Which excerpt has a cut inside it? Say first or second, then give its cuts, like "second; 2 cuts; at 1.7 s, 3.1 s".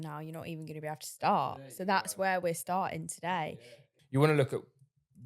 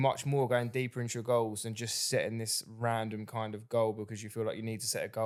first; 1 cut; at 3.5 s